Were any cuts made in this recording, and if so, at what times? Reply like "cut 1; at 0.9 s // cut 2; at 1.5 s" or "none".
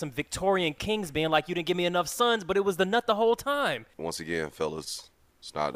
cut 1; at 3.9 s